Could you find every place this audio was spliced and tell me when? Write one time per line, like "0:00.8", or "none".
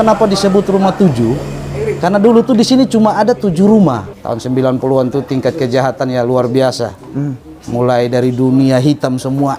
0:04.0